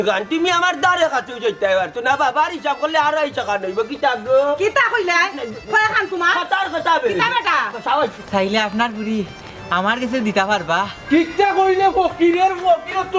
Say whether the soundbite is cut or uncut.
cut